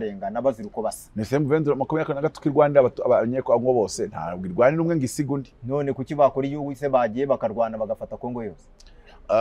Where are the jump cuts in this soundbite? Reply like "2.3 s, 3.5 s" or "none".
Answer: none